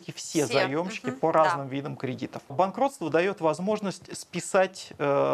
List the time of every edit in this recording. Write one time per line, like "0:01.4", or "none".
0:02.5